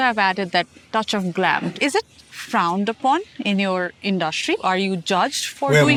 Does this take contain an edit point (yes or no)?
no